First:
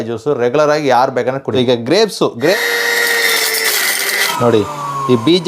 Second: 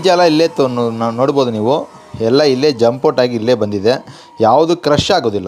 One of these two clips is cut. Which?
first; 3 cuts; at 1.5 s, 2.5 s, 4.3 s

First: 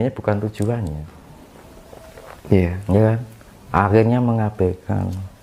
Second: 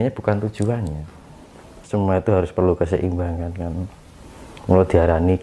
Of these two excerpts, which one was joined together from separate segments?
second; 1 cut; at 1.8 s

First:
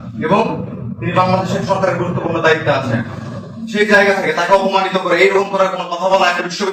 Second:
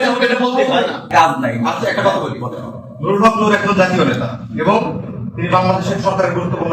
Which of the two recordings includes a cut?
second; 1 cut; at 1.1 s

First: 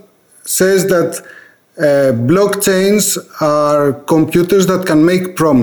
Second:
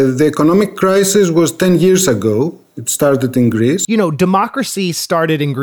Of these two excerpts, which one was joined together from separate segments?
second; 1 cut; at 3.8 s

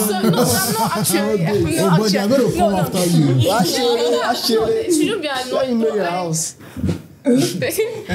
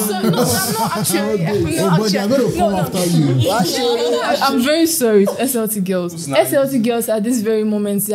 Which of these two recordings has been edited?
second; 2 cuts; at 4.3 s, 6.2 s

